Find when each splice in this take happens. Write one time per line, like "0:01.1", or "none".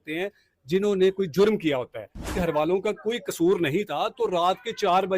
0:02.3